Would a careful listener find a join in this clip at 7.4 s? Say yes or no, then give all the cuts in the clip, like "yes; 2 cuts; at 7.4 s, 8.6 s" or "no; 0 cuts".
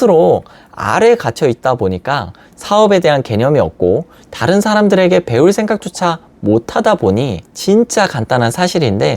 yes; 1 cut; at 7.4 s